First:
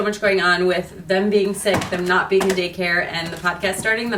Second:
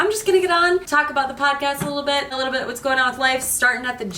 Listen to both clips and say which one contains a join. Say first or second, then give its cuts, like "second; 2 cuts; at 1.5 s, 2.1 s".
second; 2 cuts; at 0.9 s, 2.4 s